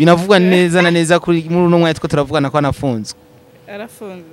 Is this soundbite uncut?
yes; 0 cuts

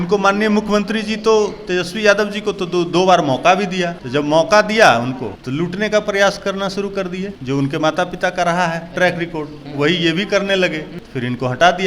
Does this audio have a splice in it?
yes; 4 cuts; at 4.0 s, 5.3 s, 7.3 s, 11.0 s

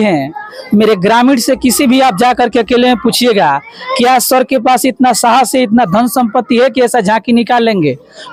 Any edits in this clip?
no; 0 cuts

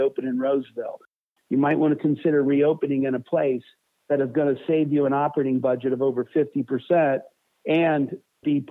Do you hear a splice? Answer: yes; 1 cut; at 1.2 s

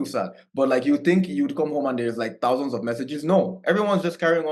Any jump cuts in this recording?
no; 0 cuts

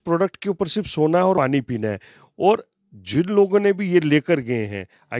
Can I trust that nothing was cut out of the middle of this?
no; 1 cut; at 1.4 s

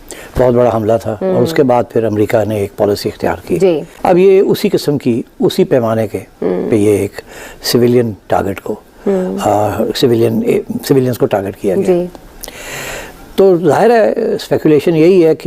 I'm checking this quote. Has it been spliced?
yes; 1 cut; at 3.9 s

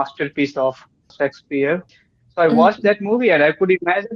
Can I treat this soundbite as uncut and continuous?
no; 2 cuts; at 1.1 s, 1.9 s

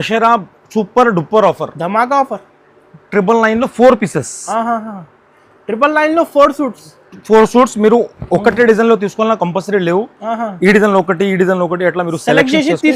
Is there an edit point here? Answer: no; 0 cuts

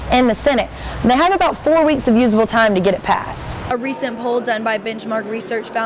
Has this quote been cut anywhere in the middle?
yes; 1 cut; at 3.6 s

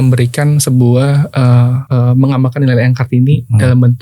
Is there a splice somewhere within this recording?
yes; 1 cut; at 1.8 s

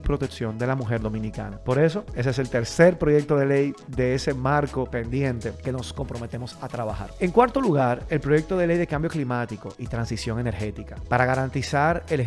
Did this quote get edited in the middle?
no; 0 cuts

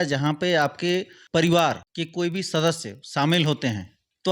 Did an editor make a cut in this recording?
yes; 2 cuts; at 1.2 s, 1.9 s

